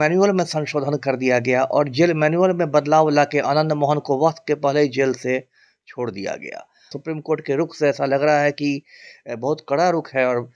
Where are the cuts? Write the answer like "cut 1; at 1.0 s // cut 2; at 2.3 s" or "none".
cut 1; at 6.9 s